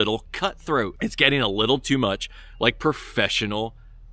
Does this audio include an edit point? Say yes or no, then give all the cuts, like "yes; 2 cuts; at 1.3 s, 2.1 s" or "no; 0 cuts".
yes; 1 cut; at 0.9 s